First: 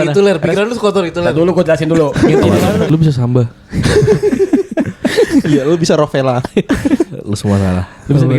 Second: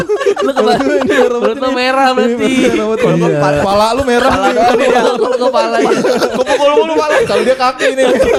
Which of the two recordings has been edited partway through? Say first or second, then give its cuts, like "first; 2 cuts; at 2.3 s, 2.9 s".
first; 1 cut; at 2.9 s